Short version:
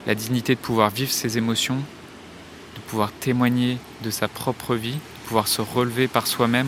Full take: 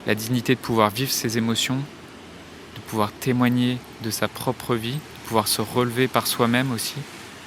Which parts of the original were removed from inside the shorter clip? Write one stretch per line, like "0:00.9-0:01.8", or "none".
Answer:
none